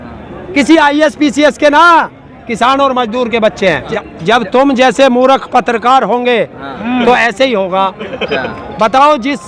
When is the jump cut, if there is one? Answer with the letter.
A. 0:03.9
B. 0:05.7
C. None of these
A